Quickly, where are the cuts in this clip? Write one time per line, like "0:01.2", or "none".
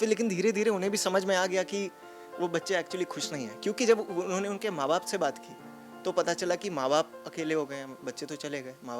none